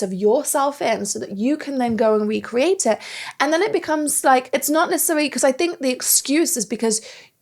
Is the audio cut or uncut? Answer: uncut